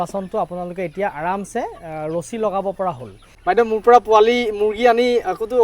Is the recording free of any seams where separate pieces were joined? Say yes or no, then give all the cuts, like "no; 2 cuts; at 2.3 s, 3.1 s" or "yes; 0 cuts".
no; 1 cut; at 3.3 s